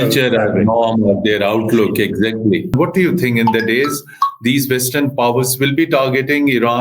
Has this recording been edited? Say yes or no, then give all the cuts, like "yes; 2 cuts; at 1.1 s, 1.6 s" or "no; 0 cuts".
yes; 1 cut; at 2.7 s